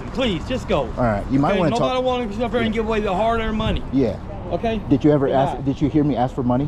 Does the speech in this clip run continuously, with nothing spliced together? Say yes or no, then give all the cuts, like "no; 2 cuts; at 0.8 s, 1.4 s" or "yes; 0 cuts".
yes; 0 cuts